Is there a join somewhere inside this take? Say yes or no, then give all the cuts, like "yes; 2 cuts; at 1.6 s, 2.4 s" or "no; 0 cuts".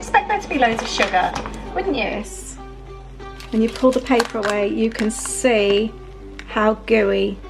yes; 1 cut; at 2.1 s